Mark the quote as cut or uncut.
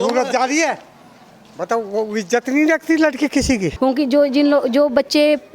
cut